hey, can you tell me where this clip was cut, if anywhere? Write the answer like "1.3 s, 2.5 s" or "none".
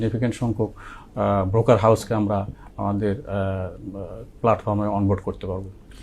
none